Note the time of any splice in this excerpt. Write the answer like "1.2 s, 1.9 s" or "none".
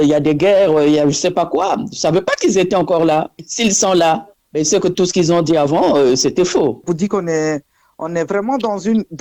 6.9 s